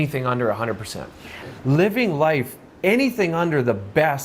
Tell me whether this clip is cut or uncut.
cut